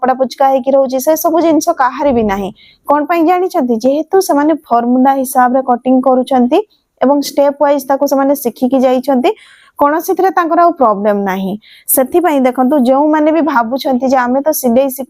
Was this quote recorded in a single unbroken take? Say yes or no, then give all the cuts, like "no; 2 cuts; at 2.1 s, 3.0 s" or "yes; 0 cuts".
yes; 0 cuts